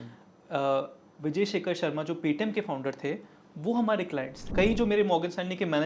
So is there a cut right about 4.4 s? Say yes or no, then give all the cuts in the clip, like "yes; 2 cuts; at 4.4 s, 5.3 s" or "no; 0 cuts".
yes; 1 cut; at 4.4 s